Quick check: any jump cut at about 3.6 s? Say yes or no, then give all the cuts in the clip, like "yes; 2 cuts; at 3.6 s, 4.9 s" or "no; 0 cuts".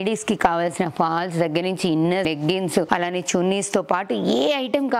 no; 1 cut; at 2.3 s